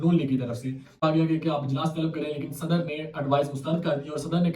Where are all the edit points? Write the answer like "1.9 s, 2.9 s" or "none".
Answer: 1.0 s